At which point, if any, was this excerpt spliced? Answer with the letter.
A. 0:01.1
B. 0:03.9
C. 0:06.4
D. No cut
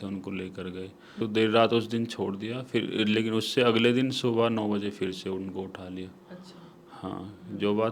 A